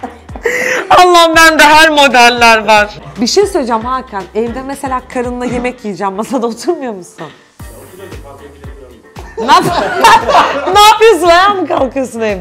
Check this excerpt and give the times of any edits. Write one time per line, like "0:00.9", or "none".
0:03.0